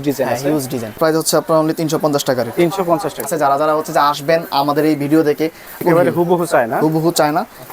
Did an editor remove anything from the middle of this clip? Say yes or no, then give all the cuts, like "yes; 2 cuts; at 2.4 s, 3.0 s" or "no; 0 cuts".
yes; 3 cuts; at 1.0 s, 3.2 s, 5.8 s